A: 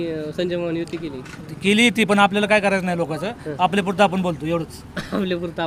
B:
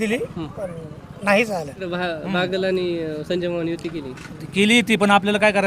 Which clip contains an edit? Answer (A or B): B